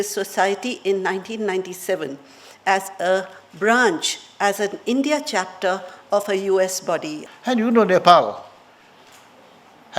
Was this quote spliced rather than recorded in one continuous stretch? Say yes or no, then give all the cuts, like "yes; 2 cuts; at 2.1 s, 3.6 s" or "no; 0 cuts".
yes; 1 cut; at 7.2 s